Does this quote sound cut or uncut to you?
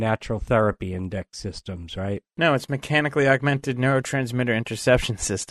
uncut